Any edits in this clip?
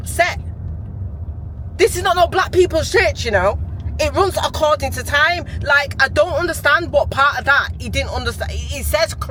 no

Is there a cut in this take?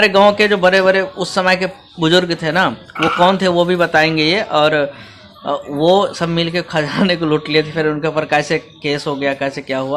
no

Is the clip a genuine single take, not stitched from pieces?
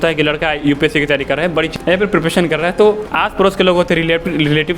no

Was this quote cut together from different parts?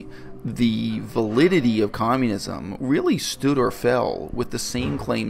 no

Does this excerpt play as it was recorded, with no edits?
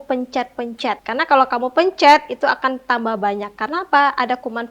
no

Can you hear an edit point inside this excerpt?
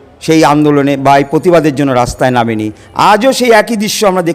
no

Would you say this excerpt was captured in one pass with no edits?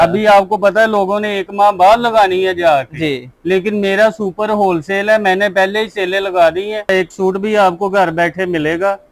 no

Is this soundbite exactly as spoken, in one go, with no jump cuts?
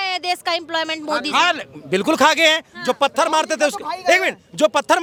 yes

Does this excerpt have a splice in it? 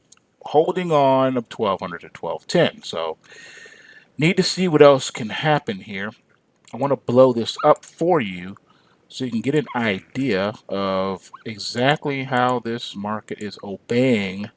no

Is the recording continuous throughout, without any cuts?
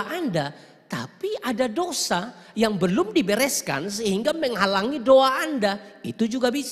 yes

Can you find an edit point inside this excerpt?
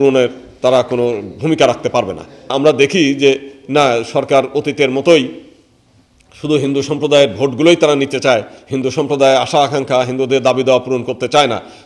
yes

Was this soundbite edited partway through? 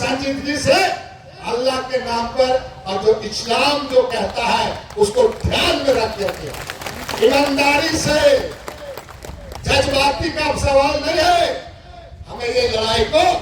no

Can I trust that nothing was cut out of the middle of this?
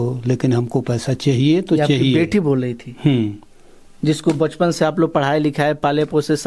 yes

